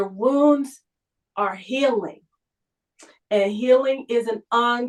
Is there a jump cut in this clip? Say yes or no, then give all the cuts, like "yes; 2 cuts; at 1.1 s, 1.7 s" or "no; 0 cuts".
no; 0 cuts